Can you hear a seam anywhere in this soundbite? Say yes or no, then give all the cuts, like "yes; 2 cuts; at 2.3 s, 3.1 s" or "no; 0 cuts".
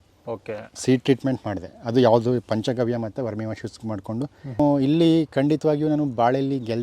yes; 1 cut; at 4.6 s